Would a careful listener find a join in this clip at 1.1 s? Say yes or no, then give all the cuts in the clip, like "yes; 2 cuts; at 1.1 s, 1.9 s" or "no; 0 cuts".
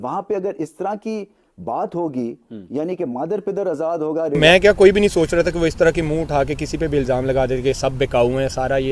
no; 1 cut; at 4.4 s